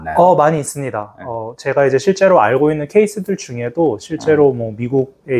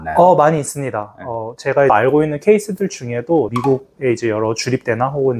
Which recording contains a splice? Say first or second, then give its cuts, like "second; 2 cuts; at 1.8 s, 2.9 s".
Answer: second; 2 cuts; at 1.9 s, 3.5 s